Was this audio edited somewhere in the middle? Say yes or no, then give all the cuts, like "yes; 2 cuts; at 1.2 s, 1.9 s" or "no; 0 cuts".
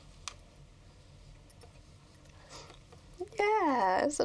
no; 0 cuts